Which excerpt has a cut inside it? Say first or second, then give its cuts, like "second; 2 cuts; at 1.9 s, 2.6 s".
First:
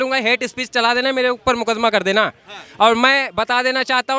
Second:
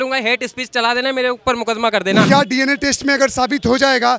second; 1 cut; at 2.3 s